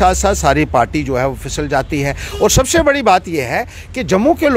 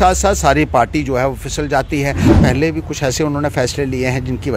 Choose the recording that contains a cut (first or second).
second